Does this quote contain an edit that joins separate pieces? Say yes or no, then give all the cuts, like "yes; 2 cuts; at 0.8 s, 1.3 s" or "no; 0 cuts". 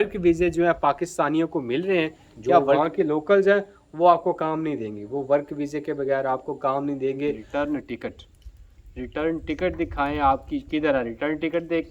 yes; 2 cuts; at 2.3 s, 7.4 s